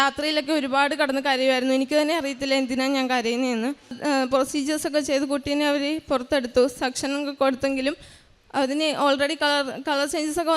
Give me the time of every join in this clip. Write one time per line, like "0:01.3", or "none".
0:04.0